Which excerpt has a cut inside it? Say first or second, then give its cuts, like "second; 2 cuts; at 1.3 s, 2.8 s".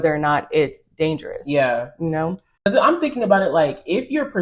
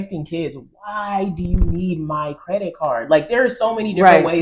first; 1 cut; at 2.5 s